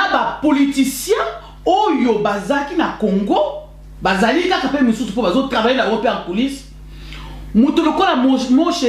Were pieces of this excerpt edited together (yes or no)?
no